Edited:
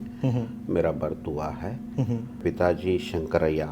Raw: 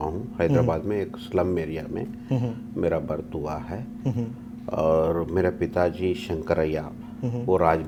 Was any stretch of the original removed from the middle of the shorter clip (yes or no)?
yes